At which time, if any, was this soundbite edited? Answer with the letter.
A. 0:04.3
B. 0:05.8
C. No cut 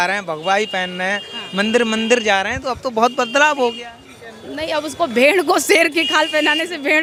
C